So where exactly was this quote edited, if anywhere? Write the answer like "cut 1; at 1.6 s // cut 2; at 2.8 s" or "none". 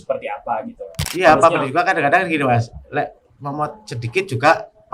cut 1; at 1.0 s